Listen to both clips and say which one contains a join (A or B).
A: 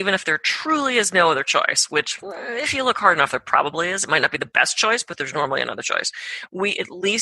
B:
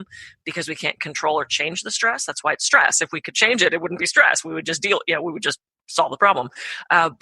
B